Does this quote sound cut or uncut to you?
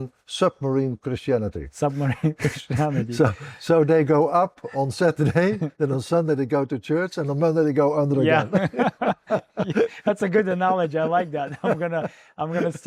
uncut